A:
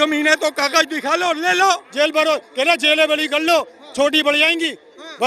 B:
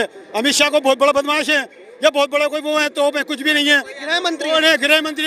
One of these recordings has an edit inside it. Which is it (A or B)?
A